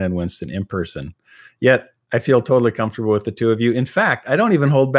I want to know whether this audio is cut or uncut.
uncut